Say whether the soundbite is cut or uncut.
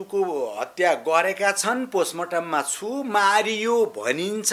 uncut